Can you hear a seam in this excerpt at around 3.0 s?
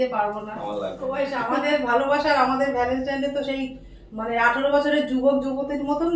no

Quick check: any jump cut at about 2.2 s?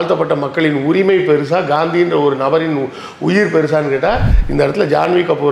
no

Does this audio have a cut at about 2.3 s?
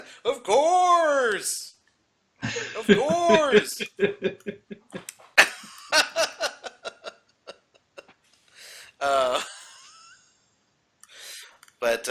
yes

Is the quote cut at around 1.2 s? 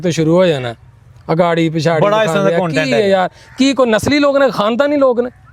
no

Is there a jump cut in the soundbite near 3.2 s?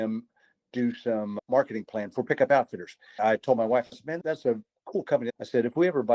yes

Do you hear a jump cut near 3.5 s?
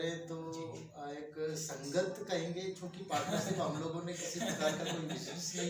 no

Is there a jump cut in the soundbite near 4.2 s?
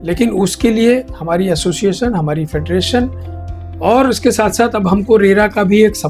no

